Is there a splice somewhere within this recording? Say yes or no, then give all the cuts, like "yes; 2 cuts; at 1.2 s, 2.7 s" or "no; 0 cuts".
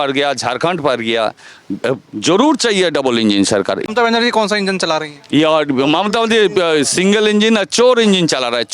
yes; 1 cut; at 3.8 s